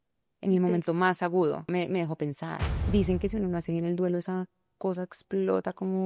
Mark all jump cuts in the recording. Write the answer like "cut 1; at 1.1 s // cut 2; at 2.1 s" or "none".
cut 1; at 1.7 s // cut 2; at 2.7 s